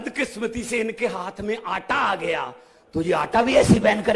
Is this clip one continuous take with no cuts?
yes; 0 cuts

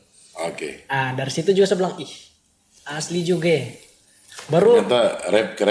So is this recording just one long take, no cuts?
yes; 0 cuts

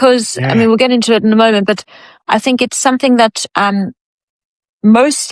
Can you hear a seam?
no; 0 cuts

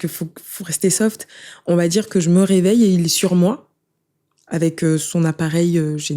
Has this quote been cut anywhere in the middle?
no; 0 cuts

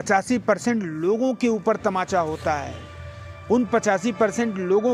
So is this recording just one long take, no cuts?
yes; 0 cuts

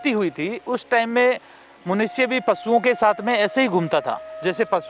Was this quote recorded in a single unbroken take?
yes; 0 cuts

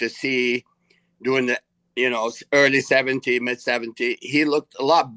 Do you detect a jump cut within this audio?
no; 0 cuts

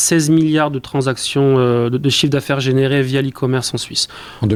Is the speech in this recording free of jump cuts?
yes; 0 cuts

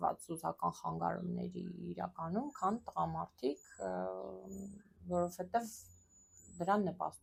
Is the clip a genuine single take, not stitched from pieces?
yes; 0 cuts

